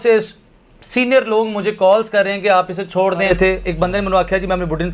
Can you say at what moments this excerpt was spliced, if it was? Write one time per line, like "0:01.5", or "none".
0:03.3